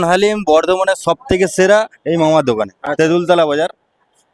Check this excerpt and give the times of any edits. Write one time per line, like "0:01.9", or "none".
none